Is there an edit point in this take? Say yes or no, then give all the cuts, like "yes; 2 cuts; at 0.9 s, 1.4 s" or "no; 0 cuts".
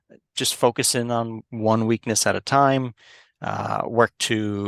no; 0 cuts